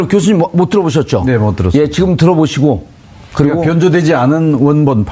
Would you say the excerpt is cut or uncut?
uncut